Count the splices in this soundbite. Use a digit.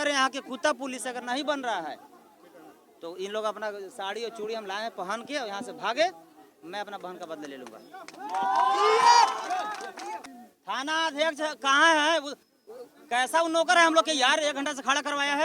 1